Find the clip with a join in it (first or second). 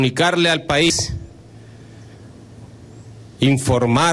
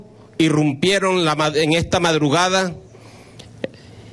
first